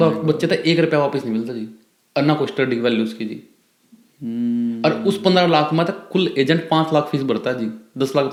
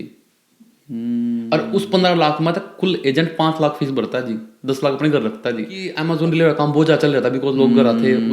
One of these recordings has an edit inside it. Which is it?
second; 1 cut; at 5.9 s

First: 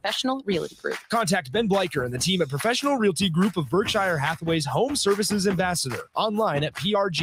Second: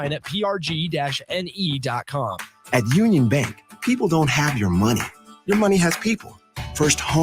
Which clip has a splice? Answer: second; 1 cut; at 2.5 s

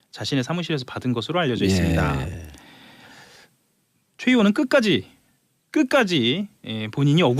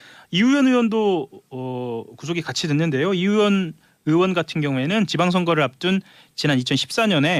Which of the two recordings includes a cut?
first; 1 cut; at 2.0 s

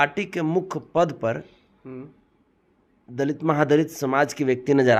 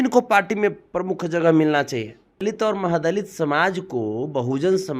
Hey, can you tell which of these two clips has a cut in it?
second; 1 cut; at 2.4 s

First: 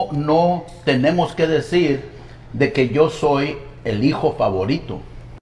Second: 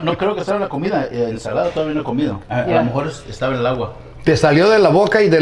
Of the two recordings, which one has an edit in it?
second; 1 cut; at 2.4 s

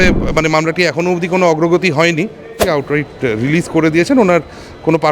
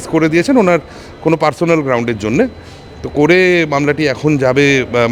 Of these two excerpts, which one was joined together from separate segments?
first; 1 cut; at 2.5 s

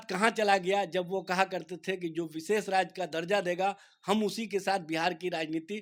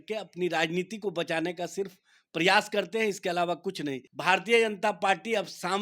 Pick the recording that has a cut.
second; 1 cut; at 4.1 s

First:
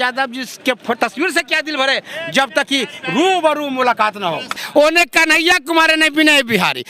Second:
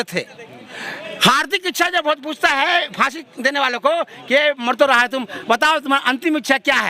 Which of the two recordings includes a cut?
first; 1 cut; at 4.6 s

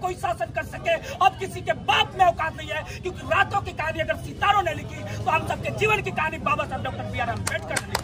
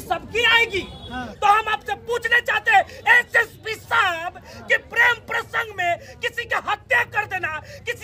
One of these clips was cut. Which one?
second; 1 cut; at 1.3 s

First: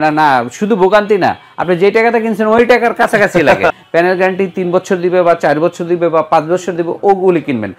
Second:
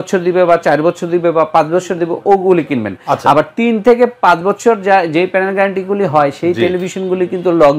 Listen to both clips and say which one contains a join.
first; 1 cut; at 3.7 s

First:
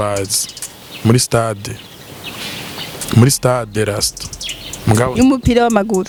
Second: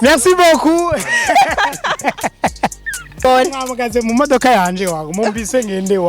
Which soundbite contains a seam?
second; 1 cut; at 3.2 s

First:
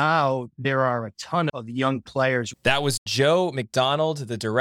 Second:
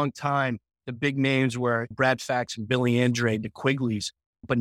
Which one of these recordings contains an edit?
first; 2 cuts; at 1.5 s, 2.9 s

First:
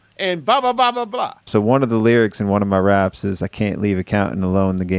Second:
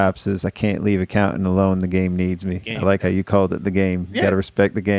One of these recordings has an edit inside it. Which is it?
first; 1 cut; at 1.5 s

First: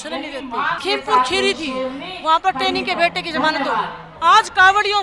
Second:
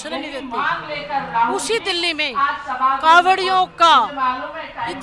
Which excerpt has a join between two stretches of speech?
first; 2 cuts; at 0.8 s, 4.0 s

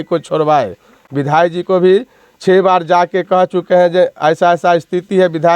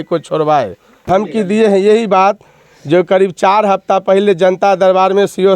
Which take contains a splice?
second; 1 cut; at 1.0 s

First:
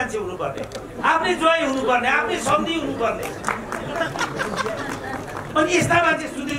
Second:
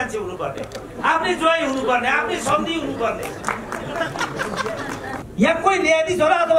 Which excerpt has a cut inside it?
second; 1 cut; at 5.3 s

